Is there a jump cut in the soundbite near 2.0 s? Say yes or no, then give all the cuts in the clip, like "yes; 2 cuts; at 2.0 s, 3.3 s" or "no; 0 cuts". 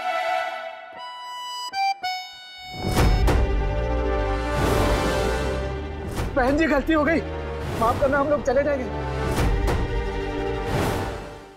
no; 0 cuts